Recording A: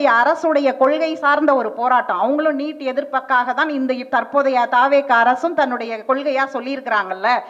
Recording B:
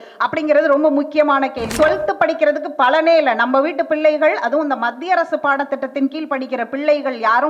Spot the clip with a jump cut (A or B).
B